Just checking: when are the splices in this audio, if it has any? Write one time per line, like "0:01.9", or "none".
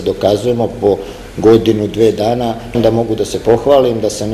0:02.8